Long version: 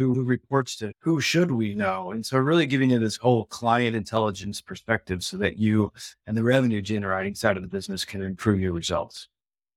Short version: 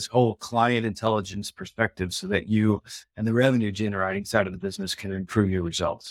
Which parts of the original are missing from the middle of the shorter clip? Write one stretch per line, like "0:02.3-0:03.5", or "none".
none